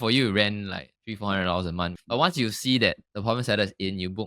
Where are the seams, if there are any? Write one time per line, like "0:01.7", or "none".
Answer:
0:00.9
0:02.0